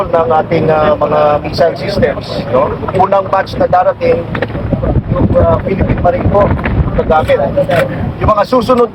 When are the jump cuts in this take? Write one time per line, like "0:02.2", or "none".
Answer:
none